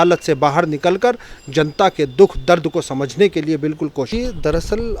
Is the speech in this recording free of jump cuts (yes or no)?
no